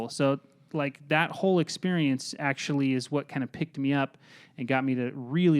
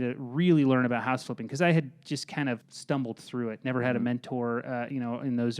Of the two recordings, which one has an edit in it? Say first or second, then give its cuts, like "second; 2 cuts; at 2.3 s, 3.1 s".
second; 1 cut; at 2.7 s